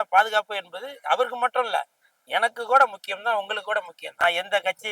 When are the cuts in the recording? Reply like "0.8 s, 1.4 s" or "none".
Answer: 4.0 s